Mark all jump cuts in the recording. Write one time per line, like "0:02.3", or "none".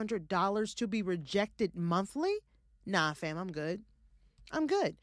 none